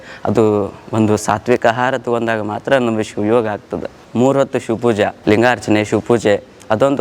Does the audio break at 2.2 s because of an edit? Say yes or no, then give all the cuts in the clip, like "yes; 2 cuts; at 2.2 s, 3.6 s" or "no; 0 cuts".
no; 2 cuts; at 4.0 s, 5.2 s